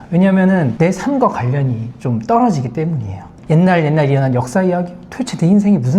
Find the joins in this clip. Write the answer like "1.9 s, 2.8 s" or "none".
3.3 s

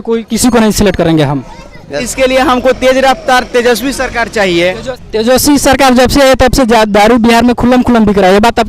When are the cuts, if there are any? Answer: 2.0 s, 4.9 s

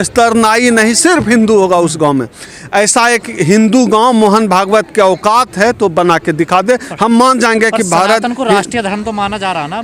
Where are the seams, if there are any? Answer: none

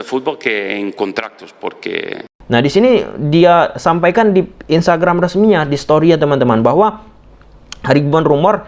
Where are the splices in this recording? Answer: 2.2 s

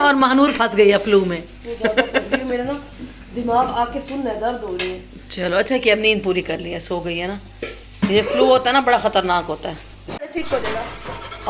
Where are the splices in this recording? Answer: none

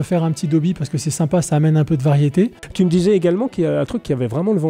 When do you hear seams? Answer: 2.8 s

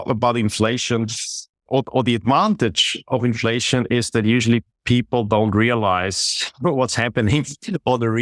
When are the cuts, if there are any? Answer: none

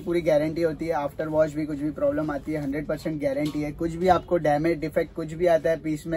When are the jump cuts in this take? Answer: none

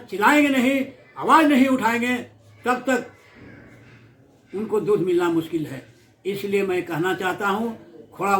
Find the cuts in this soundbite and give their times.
none

